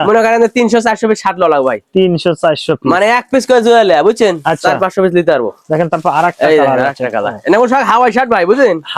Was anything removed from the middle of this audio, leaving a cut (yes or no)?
no